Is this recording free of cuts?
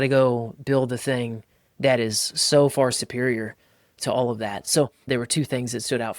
no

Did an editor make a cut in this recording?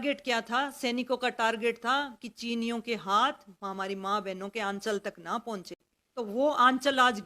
yes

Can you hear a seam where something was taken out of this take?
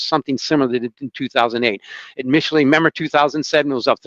no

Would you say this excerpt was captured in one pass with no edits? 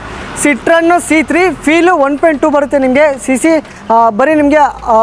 yes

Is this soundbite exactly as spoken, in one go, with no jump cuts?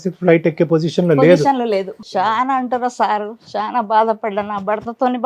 no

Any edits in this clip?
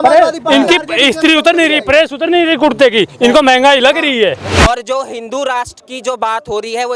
yes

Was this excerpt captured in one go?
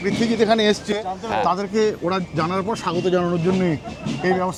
yes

